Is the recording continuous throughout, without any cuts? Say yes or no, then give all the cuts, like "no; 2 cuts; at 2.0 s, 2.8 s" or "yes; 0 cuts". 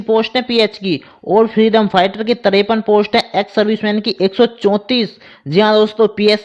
yes; 0 cuts